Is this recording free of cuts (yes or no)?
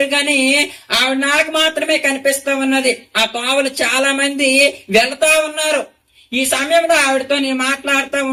yes